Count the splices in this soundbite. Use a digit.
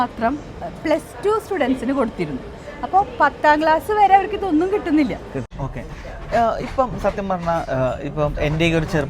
1